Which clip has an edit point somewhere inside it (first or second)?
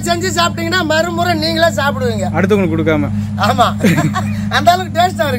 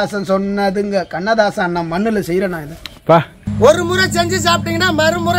second